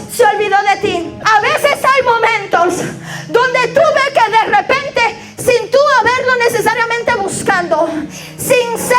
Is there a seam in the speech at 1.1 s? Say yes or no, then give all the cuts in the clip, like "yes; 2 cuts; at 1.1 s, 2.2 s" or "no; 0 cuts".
yes; 1 cut; at 1.1 s